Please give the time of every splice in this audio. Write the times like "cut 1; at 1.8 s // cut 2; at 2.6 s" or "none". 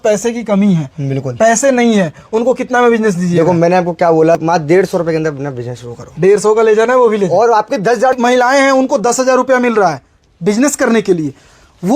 cut 1; at 4.4 s // cut 2; at 8.1 s